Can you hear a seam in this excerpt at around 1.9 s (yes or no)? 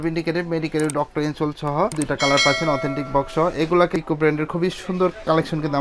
yes